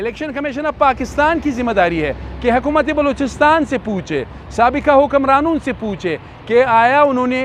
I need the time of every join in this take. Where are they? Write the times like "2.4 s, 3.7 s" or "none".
none